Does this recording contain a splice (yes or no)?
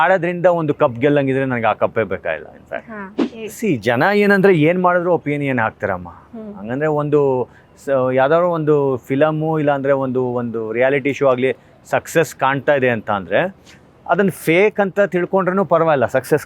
yes